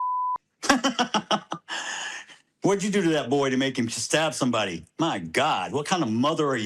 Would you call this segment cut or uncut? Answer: uncut